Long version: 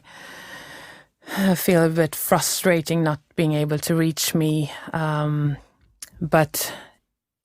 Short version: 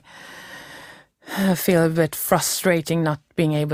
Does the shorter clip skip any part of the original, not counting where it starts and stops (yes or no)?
no